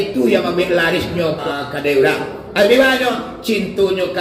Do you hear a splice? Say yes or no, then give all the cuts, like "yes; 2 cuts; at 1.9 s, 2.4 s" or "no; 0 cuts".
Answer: yes; 1 cut; at 1.4 s